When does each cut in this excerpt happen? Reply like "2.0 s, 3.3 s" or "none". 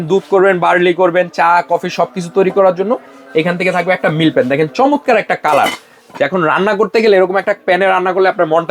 none